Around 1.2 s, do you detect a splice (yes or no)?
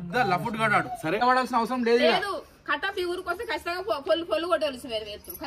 yes